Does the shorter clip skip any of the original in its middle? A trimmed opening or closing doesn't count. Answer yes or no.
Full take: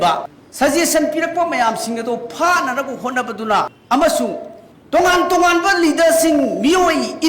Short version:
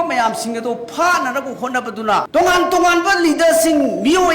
yes